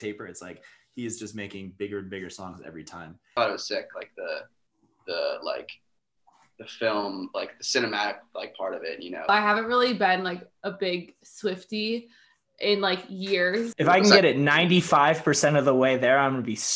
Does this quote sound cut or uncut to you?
cut